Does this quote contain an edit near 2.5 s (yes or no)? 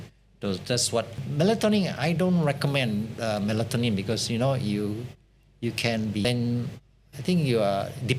no